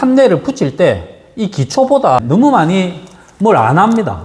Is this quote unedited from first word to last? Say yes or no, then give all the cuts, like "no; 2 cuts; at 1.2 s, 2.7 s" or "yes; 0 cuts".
no; 1 cut; at 2.0 s